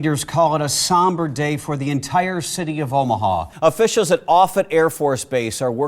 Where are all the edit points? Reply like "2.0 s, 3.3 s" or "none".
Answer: 3.5 s